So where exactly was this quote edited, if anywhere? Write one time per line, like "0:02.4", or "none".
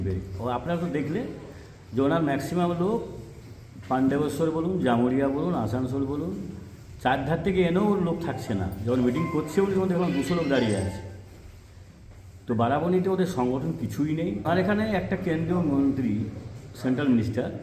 none